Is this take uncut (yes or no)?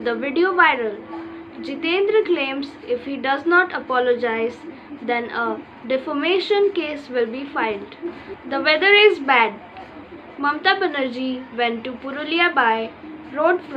no